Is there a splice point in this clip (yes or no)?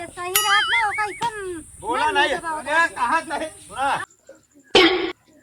yes